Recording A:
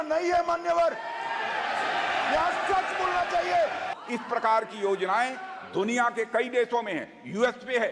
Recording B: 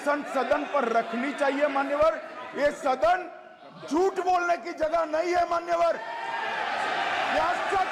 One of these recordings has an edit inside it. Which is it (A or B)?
A